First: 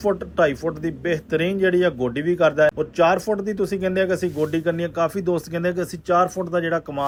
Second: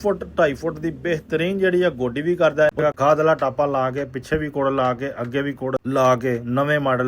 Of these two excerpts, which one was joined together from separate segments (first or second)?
second